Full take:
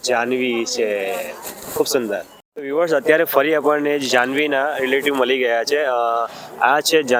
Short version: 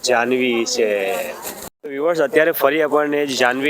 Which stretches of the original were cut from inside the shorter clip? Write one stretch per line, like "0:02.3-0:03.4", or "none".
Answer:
0:01.6-0:02.3